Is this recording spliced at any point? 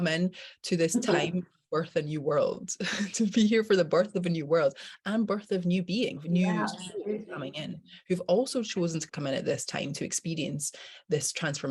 yes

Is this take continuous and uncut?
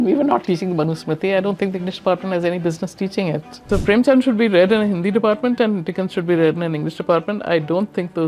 no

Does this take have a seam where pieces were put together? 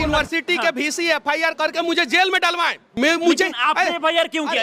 yes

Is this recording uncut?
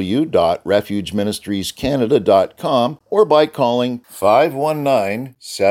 no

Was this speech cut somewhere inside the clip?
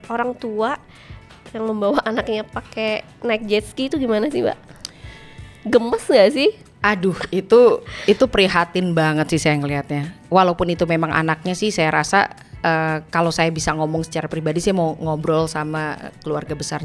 no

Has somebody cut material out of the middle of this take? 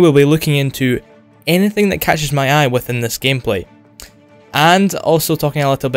no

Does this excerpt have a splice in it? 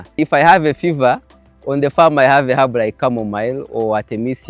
no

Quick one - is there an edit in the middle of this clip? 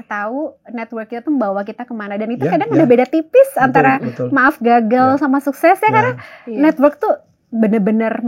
no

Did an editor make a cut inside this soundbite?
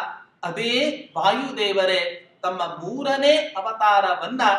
no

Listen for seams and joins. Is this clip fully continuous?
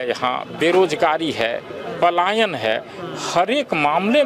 yes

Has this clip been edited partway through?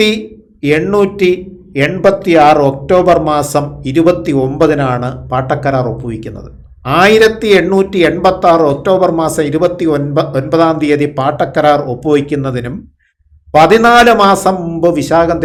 no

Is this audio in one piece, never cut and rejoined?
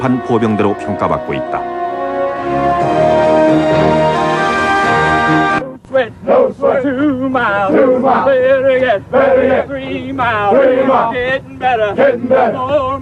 yes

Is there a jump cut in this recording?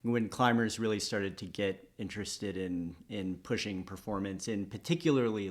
no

